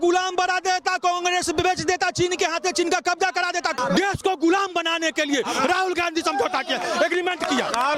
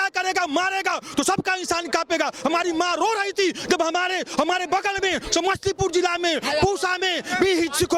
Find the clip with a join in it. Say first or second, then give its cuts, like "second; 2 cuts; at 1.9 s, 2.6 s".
first; 1 cut; at 3.7 s